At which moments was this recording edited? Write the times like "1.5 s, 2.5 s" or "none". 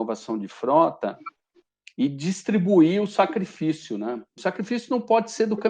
4.4 s